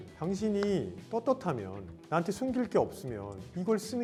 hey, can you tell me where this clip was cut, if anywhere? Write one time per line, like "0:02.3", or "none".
none